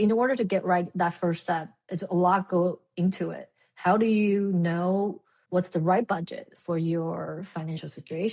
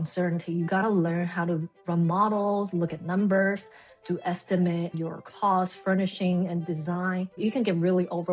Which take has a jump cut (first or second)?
second